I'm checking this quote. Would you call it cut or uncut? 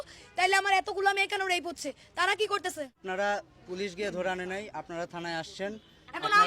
cut